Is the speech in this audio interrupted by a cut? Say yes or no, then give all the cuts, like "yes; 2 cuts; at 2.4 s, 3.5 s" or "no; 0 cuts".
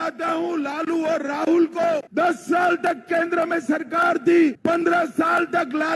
yes; 2 cuts; at 2.1 s, 4.6 s